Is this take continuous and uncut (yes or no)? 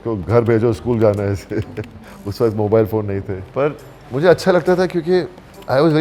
no